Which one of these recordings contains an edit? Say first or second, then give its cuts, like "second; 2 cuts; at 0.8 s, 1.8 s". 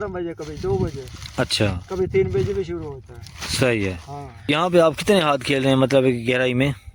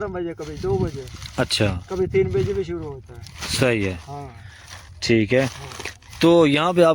first; 1 cut; at 4.5 s